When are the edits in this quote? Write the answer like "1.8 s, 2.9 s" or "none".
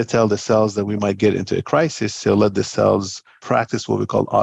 3.4 s